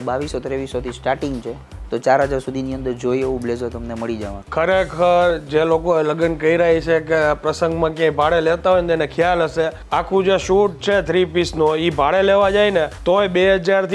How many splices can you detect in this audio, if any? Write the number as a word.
three